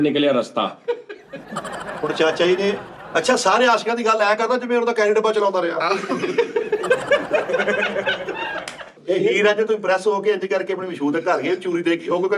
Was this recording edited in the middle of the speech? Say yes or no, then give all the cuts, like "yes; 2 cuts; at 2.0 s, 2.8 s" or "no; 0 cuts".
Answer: yes; 2 cuts; at 2.9 s, 9.0 s